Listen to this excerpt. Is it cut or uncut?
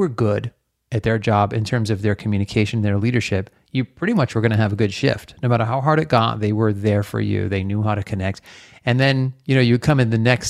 uncut